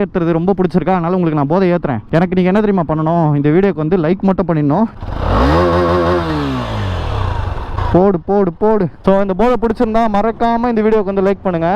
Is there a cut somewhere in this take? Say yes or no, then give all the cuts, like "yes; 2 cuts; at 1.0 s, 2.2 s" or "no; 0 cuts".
yes; 4 cuts; at 2.0 s, 4.9 s, 7.7 s, 9.0 s